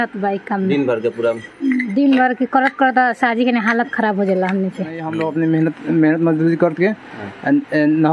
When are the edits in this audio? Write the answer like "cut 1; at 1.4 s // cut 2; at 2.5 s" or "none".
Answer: cut 1; at 5.1 s

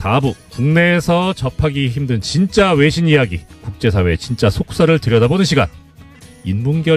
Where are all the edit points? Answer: none

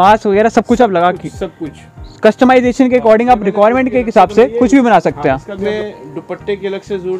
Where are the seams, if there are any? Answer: cut 1; at 5.6 s

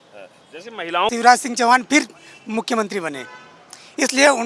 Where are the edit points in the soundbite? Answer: cut 1; at 1.1 s

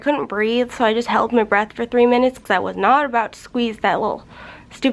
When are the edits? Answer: none

